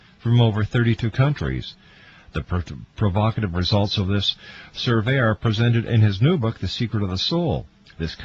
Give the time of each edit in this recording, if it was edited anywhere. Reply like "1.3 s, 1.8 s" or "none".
3.7 s